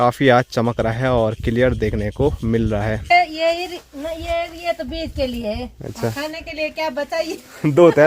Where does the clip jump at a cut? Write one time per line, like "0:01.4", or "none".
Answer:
0:03.1